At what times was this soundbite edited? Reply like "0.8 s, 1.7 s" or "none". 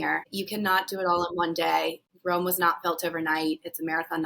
2.1 s